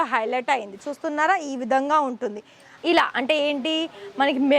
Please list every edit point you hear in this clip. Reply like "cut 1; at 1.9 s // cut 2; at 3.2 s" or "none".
cut 1; at 2.8 s